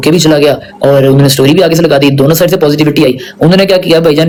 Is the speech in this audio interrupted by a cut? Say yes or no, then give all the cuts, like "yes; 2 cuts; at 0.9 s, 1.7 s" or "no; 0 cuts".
no; 0 cuts